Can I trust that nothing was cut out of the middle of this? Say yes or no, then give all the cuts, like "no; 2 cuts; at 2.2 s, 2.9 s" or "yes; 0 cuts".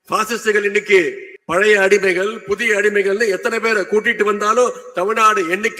no; 1 cut; at 1.3 s